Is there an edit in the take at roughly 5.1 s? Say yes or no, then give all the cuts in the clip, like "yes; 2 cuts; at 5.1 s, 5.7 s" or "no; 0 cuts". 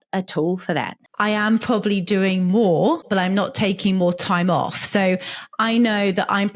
no; 2 cuts; at 1.0 s, 3.1 s